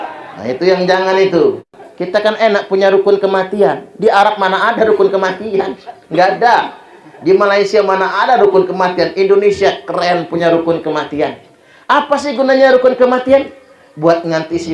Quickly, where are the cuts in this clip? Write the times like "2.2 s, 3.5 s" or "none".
1.7 s

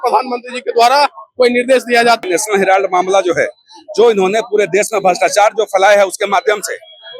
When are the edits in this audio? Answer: 2.2 s

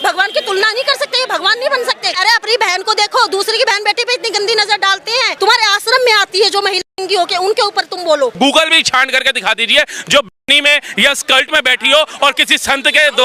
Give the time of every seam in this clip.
2.2 s, 5.4 s, 8.3 s

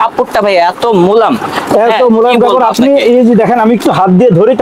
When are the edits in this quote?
none

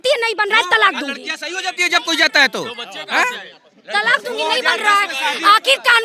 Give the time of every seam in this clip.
none

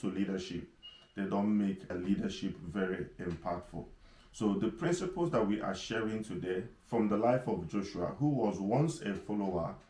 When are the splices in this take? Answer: 1.9 s

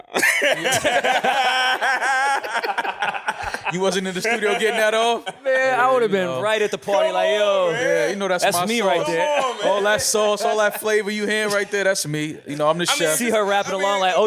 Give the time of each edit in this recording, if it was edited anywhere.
none

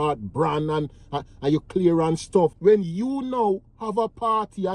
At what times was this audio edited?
2.9 s

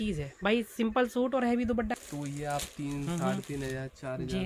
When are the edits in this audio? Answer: 1.9 s

